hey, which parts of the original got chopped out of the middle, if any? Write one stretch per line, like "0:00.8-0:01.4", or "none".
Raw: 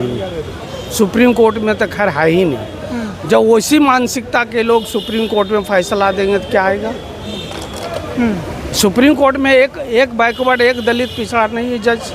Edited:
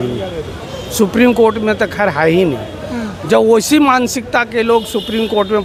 none